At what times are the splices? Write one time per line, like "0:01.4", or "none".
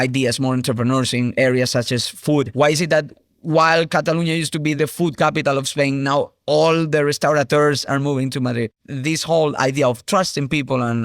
0:08.8